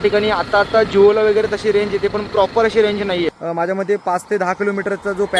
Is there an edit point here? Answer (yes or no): yes